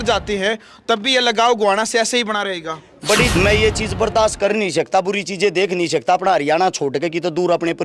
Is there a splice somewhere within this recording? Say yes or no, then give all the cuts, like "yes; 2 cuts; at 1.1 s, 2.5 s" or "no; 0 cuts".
yes; 1 cut; at 3.3 s